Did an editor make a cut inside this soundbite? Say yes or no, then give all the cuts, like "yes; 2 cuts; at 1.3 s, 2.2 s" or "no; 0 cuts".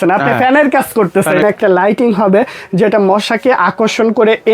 yes; 1 cut; at 1.4 s